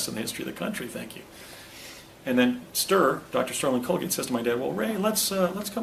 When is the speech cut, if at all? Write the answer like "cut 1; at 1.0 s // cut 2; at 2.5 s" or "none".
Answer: none